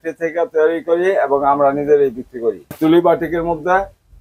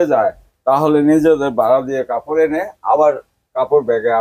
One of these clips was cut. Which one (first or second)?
first